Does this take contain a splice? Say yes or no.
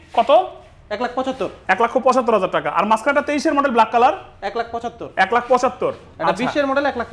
no